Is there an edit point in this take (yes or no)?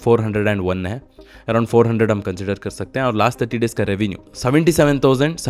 no